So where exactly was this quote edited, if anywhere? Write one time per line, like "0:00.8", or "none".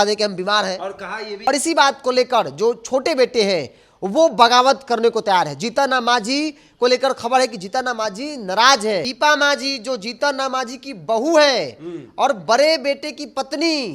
0:01.3
0:09.1